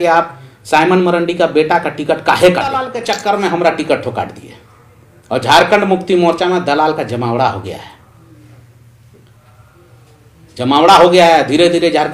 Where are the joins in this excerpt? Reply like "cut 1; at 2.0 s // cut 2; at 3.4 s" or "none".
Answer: cut 1; at 3.0 s

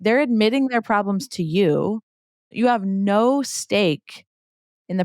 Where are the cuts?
cut 1; at 2.5 s

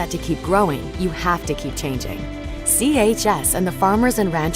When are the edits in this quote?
cut 1; at 1.4 s

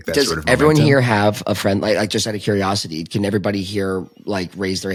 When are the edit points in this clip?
none

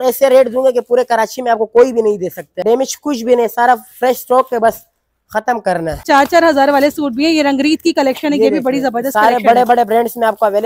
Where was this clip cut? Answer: cut 1; at 2.6 s // cut 2; at 6.0 s

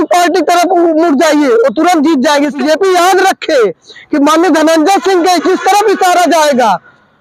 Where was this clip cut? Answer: cut 1; at 2.6 s

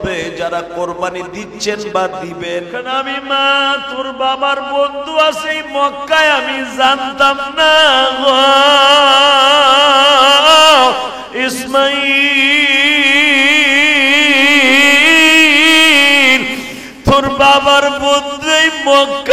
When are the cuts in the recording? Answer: cut 1; at 2.8 s

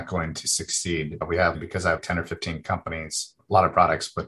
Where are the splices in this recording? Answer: cut 1; at 1.9 s // cut 2; at 3.3 s

